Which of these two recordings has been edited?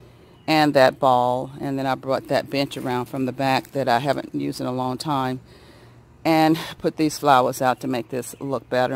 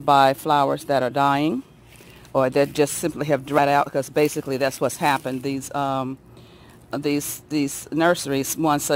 second; 1 cut; at 3.6 s

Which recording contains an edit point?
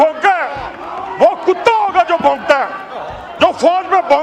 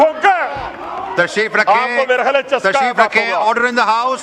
second; 1 cut; at 1.0 s

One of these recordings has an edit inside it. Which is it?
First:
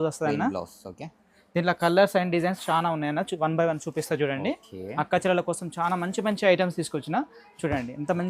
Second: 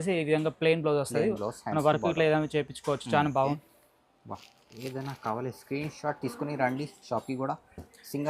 second; 1 cut; at 3.6 s

